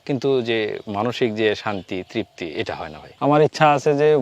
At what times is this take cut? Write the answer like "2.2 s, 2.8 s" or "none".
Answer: 3.0 s